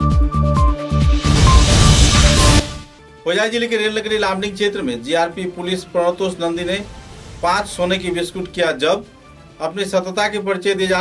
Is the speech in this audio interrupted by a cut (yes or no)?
no